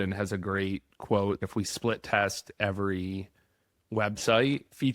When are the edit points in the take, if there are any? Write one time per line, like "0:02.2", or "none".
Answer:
0:01.4